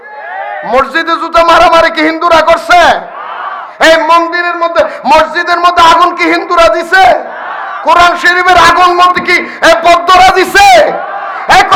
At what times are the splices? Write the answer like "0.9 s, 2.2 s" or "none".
none